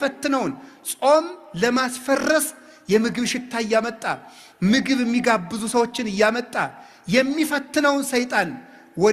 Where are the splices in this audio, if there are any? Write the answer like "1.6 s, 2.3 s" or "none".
none